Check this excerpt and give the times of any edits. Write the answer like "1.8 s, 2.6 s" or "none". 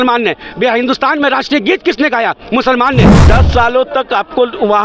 3.2 s